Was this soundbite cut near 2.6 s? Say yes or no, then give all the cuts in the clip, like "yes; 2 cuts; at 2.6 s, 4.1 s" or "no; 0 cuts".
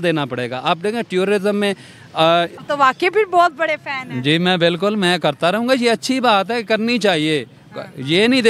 yes; 1 cut; at 2.6 s